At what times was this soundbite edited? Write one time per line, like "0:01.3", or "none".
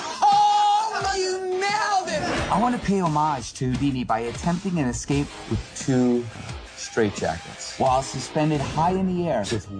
none